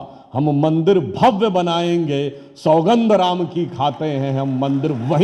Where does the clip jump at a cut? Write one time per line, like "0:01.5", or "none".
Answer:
none